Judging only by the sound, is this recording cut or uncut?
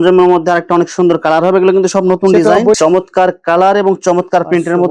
cut